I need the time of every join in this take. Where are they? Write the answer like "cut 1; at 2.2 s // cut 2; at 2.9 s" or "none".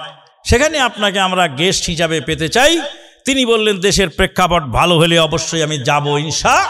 none